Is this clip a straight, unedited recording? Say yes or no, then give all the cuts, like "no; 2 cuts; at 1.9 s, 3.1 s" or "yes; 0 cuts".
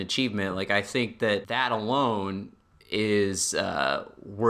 no; 1 cut; at 1.5 s